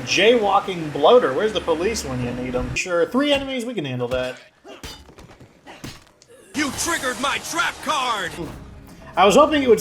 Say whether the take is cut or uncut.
cut